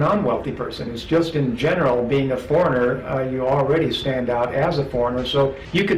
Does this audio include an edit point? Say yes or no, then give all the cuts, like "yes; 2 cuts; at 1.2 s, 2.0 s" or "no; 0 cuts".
no; 0 cuts